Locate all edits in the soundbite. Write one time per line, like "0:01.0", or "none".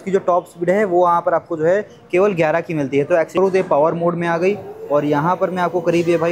0:03.3